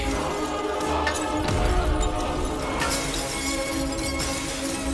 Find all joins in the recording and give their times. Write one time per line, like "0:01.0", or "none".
0:02.7